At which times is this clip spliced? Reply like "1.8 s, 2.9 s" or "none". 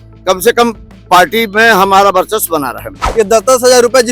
3.0 s